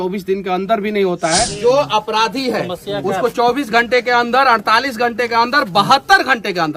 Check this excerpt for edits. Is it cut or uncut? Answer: cut